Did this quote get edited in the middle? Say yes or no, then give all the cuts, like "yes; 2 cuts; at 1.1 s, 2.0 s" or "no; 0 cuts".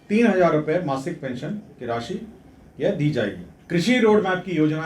yes; 1 cut; at 3.5 s